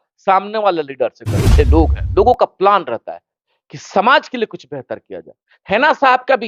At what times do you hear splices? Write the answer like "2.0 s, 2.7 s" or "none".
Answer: 1.6 s